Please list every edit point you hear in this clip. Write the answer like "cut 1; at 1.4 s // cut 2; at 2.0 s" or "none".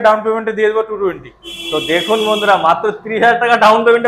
none